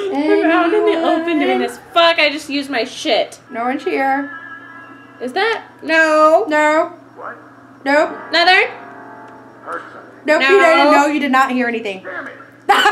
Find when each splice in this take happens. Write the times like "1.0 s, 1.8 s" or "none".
3.4 s